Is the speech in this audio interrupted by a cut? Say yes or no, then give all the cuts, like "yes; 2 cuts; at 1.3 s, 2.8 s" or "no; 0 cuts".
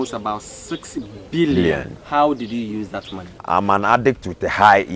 yes; 1 cut; at 1.9 s